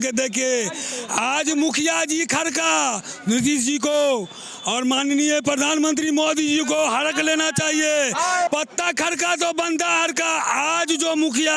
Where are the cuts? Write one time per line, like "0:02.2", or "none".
0:08.5